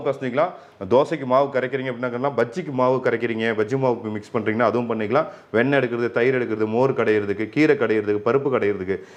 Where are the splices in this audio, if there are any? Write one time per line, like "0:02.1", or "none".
none